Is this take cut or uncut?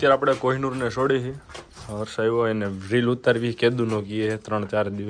uncut